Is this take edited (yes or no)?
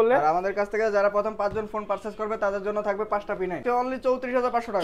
yes